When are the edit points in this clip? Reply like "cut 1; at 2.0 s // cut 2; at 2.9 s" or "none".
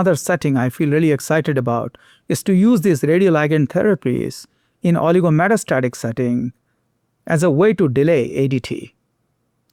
none